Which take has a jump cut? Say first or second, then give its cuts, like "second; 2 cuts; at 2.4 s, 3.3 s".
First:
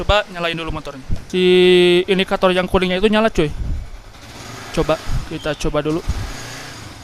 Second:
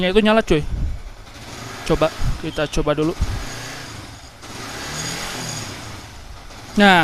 first; 1 cut; at 1.2 s